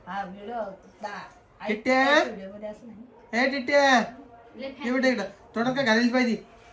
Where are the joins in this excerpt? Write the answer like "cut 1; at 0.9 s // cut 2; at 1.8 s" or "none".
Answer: none